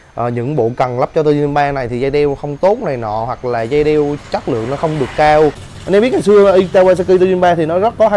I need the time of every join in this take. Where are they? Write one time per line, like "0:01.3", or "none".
0:05.7